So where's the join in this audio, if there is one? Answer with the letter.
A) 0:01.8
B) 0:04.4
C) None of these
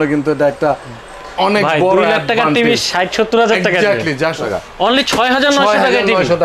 B